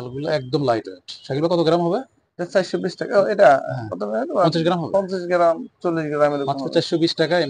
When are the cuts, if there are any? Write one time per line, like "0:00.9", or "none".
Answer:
none